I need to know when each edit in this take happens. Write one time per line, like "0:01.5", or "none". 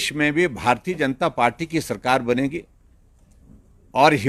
none